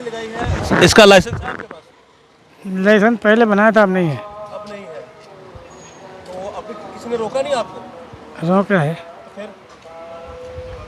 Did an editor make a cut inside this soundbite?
no; 0 cuts

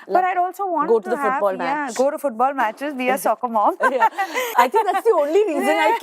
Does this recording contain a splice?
yes; 1 cut; at 4.5 s

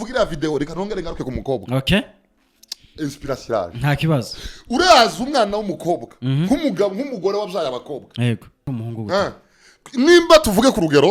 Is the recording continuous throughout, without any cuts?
no; 1 cut; at 8.7 s

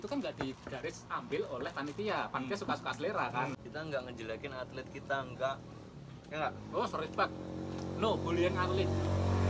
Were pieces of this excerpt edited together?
yes; 1 cut; at 3.6 s

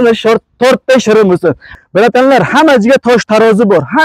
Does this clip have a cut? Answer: yes; 1 cut; at 1.7 s

